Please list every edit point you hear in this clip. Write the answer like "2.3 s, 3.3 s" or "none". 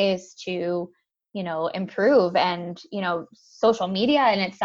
none